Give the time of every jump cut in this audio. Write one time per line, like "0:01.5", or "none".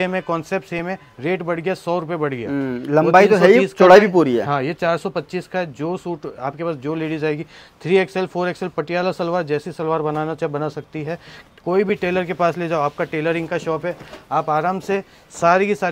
none